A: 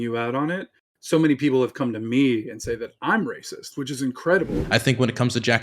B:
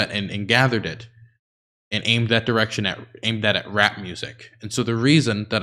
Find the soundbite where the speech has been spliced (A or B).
A